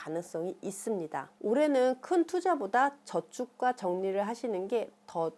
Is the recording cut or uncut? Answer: cut